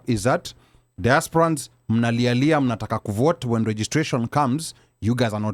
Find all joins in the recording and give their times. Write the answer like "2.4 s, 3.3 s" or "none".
none